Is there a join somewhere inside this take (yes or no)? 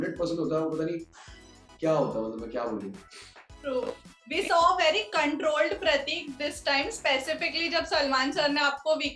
no